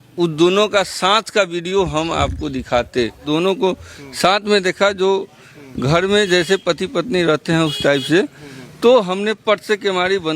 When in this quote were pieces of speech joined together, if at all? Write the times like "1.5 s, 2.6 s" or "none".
3.2 s